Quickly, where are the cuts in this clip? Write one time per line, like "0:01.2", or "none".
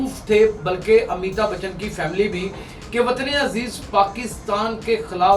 none